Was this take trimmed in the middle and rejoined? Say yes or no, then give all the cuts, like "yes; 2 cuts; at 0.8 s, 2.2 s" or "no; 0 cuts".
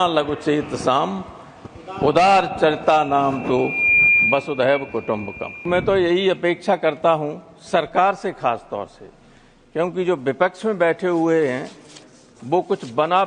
yes; 1 cut; at 5.7 s